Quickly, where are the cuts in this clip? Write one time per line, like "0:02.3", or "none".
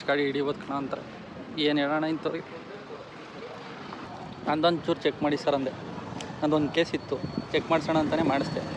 0:04.1